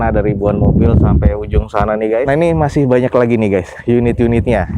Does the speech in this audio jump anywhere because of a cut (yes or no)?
yes